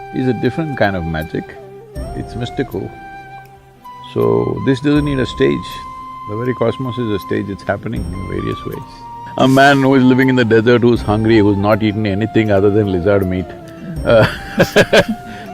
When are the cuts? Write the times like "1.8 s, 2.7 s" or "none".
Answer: 9.2 s

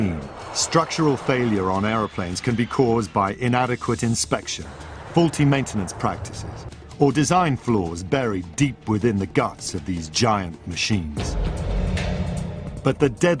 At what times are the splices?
11.2 s

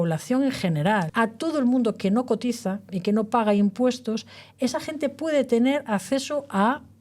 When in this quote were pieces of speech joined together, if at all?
1.1 s

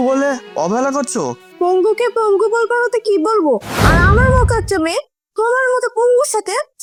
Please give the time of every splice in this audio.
none

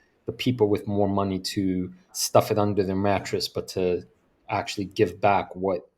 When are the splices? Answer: 2.2 s

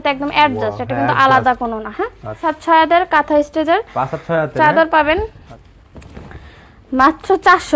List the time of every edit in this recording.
2.5 s, 5.4 s

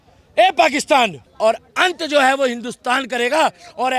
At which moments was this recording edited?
1.2 s

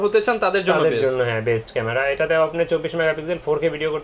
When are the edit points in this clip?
none

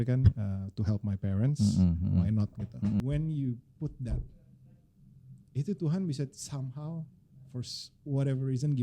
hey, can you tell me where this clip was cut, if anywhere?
3.0 s

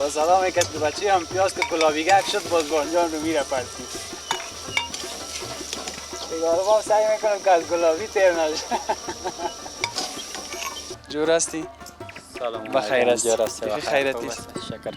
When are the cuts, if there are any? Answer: 11.0 s

